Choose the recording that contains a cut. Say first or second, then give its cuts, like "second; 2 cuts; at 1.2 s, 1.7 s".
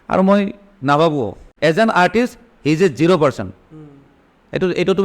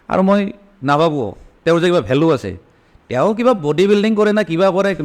first; 1 cut; at 1.4 s